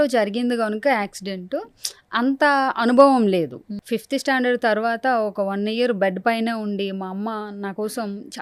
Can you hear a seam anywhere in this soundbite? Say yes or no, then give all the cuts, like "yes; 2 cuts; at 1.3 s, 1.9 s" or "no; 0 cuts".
yes; 1 cut; at 3.8 s